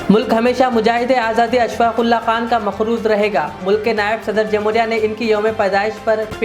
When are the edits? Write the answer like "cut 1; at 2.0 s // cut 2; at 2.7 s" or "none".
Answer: none